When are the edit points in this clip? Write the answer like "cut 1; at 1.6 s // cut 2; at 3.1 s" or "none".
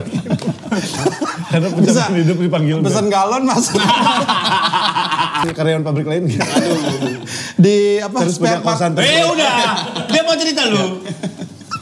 cut 1; at 5.4 s